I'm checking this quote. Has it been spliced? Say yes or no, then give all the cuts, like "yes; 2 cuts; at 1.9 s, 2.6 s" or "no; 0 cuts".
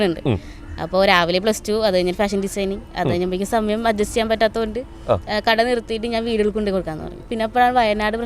yes; 1 cut; at 7.3 s